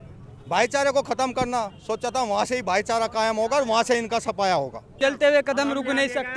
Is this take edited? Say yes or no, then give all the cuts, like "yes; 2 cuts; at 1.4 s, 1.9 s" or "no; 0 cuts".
yes; 1 cut; at 4.8 s